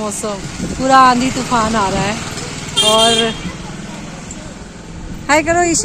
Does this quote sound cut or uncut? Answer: uncut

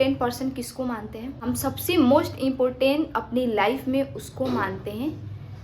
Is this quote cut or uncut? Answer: cut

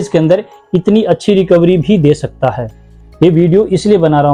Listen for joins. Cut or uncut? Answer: uncut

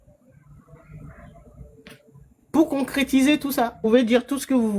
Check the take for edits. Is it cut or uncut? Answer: cut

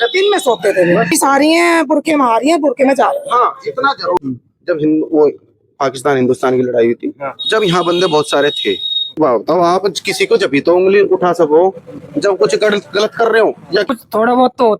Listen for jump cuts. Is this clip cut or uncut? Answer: cut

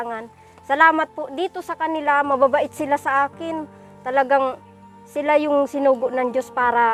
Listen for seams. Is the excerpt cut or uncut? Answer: uncut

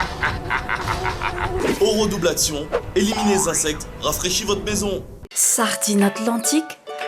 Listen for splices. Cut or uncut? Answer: uncut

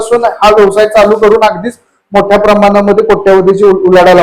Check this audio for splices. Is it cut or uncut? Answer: uncut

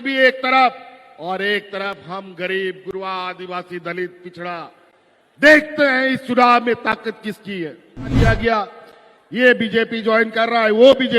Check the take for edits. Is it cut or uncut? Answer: cut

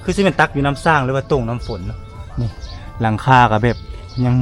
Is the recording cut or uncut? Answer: uncut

